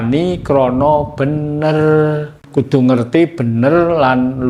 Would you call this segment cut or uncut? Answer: cut